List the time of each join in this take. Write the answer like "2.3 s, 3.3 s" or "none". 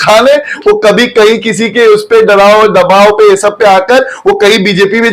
none